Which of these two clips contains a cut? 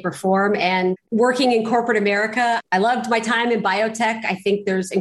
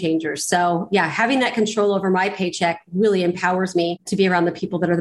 second; 1 cut; at 4.0 s

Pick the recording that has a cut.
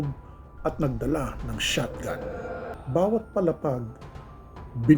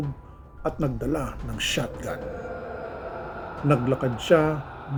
first; 1 cut; at 2.7 s

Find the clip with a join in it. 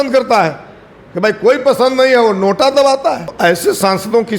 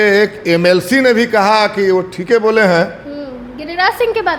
first; 1 cut; at 3.3 s

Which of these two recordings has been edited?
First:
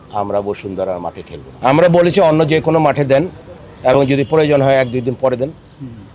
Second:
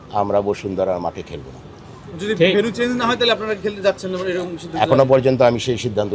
first; 1 cut; at 1.4 s

